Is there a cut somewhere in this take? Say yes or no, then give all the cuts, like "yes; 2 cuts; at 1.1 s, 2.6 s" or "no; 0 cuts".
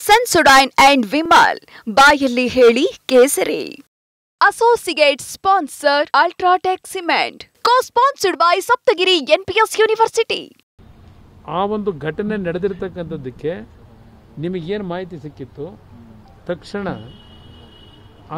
yes; 1 cut; at 10.7 s